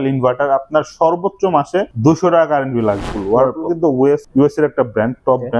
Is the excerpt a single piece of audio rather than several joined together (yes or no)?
no